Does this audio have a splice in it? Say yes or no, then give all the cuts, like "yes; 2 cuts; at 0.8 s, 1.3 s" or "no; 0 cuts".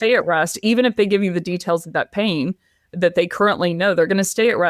no; 0 cuts